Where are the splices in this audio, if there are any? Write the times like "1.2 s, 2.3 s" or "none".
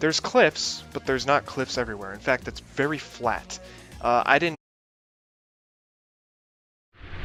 none